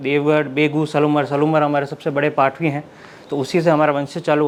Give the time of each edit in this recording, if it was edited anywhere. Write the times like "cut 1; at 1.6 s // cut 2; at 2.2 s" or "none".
none